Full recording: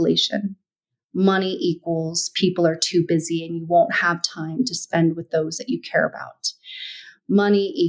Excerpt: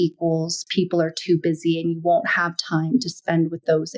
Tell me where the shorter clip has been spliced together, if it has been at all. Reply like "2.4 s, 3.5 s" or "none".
none